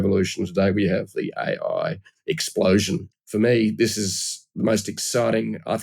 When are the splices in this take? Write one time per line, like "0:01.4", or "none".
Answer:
0:03.1